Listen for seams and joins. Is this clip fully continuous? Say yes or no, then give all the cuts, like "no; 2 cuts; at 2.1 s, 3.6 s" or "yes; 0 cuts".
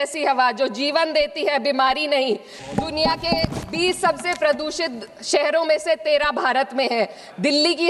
no; 1 cut; at 2.6 s